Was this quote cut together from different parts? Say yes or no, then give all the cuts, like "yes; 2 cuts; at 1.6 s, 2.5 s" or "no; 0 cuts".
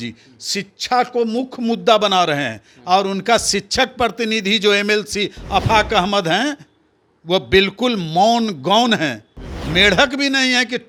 no; 0 cuts